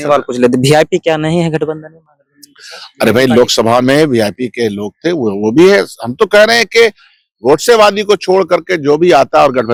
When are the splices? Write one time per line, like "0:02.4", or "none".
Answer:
none